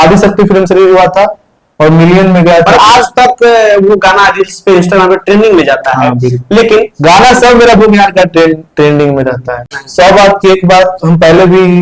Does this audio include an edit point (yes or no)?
yes